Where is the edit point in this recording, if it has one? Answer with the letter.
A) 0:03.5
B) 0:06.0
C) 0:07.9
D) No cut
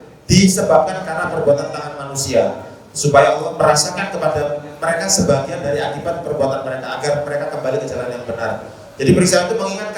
A